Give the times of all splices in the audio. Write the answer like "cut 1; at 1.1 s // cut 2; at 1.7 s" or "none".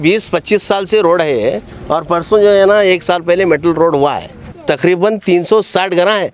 cut 1; at 4.5 s